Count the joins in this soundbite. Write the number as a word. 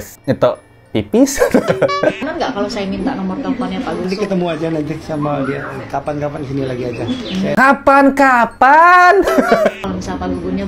three